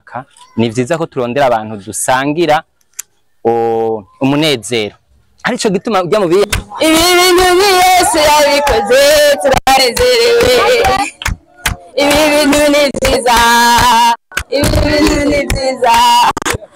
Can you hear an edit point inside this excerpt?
yes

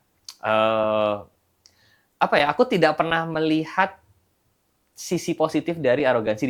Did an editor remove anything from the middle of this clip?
no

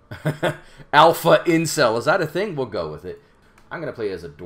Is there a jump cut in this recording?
yes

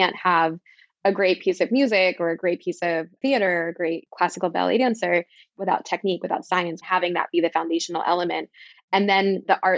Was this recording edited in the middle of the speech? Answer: yes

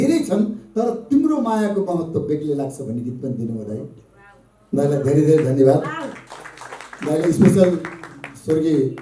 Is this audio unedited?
yes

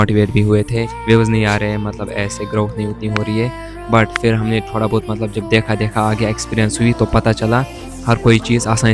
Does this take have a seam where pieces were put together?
no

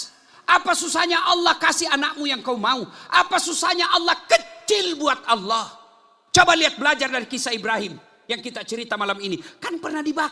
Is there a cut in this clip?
no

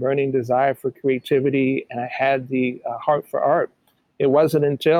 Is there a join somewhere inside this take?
no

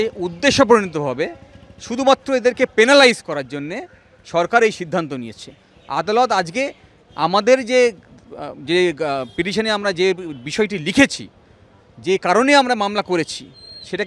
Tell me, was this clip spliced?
no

